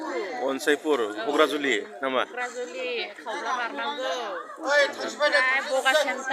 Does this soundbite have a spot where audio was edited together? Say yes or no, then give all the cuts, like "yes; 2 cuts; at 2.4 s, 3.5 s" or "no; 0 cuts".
no; 0 cuts